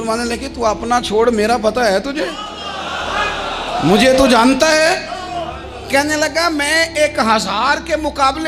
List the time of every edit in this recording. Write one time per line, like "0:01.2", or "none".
none